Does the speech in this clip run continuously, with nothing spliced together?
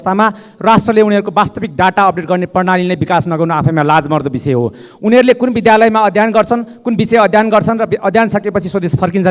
yes; 0 cuts

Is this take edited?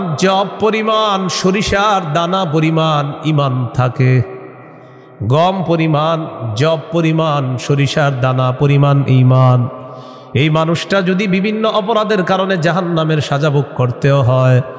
no; 0 cuts

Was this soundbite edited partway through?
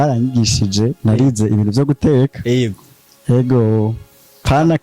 no; 0 cuts

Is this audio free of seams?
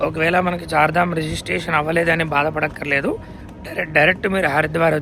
yes; 0 cuts

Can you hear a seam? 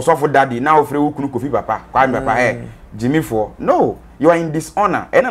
no; 0 cuts

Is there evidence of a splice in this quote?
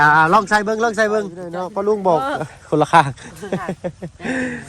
yes; 1 cut; at 1.5 s

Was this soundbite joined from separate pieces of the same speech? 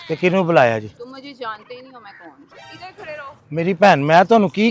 no; 0 cuts

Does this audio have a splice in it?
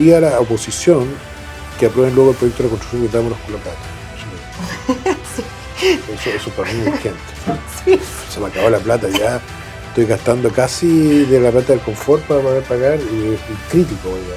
no; 0 cuts

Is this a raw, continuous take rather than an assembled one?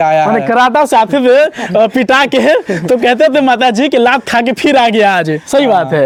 yes; 0 cuts

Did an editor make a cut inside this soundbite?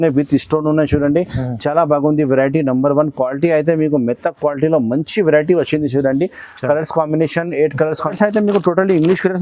yes; 1 cut; at 8.1 s

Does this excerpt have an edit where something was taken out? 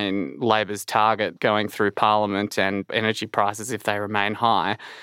yes; 1 cut; at 2.9 s

